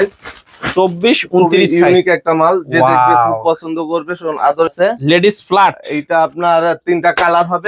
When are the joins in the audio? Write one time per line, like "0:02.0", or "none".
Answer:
0:04.7